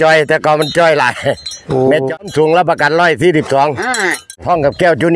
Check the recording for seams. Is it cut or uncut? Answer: cut